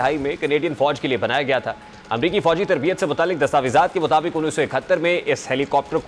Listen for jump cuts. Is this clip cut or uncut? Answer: uncut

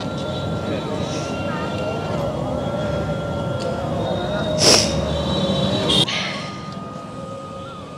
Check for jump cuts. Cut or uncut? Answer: cut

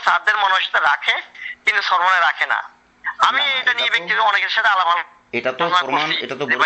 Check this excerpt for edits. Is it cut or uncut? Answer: uncut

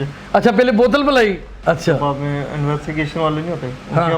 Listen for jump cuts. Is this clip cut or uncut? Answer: cut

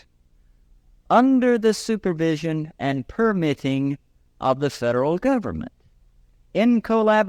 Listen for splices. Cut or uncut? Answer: uncut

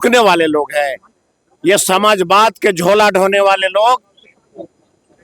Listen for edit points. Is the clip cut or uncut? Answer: uncut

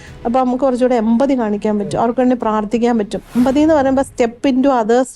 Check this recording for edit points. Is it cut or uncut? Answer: cut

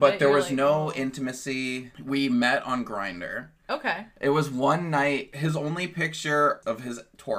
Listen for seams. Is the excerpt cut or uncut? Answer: cut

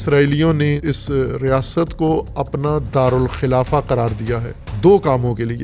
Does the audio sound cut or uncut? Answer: uncut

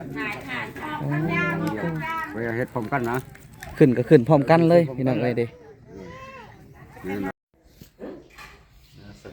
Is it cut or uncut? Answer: cut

